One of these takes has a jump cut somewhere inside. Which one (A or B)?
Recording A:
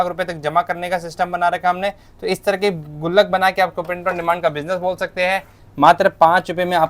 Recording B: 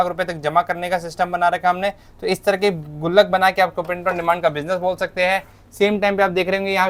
A